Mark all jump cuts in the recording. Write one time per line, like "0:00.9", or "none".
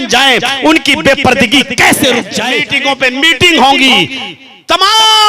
0:02.4